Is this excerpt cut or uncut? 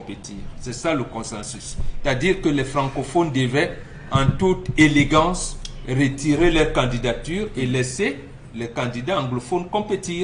uncut